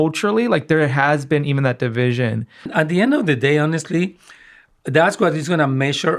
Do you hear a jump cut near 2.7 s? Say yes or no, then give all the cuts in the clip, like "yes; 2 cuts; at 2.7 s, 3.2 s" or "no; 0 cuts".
yes; 1 cut; at 2.7 s